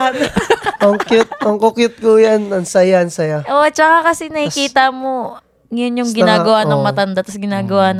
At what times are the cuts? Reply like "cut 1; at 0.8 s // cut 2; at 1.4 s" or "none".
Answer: none